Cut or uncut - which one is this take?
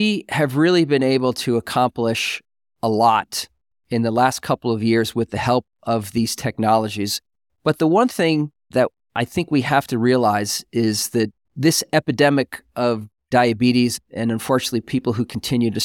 cut